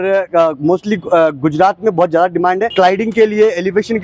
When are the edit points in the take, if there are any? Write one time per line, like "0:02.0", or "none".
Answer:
0:02.7